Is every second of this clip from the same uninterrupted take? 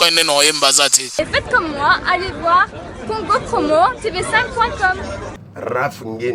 no; 1 cut; at 1.0 s

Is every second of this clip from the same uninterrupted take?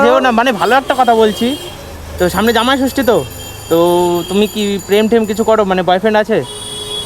yes; 0 cuts

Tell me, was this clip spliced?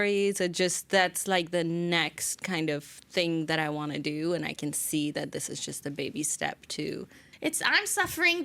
yes; 1 cut; at 7.3 s

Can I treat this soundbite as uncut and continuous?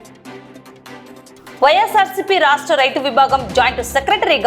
no; 1 cut; at 1.5 s

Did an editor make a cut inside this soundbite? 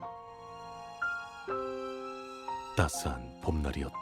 yes; 1 cut; at 2.6 s

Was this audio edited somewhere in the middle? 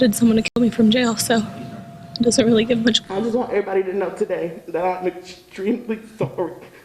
yes; 1 cut; at 3.0 s

